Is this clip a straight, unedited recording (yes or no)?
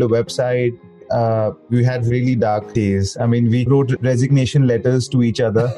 no